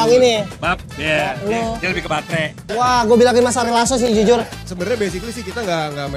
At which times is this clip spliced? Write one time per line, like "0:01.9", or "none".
0:02.6
0:04.5